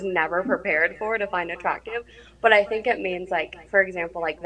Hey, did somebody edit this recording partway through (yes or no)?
yes